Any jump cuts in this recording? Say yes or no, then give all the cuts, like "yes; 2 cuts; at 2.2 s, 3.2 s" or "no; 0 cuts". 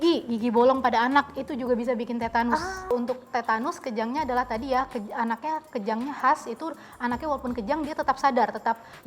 yes; 1 cut; at 2.9 s